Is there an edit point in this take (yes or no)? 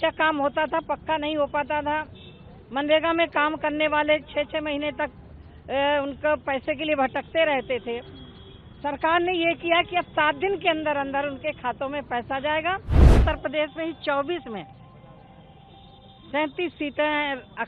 yes